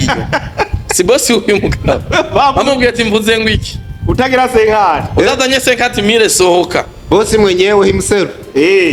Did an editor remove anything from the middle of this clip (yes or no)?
no